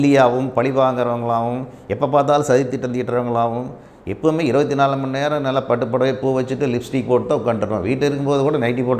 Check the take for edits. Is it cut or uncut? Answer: uncut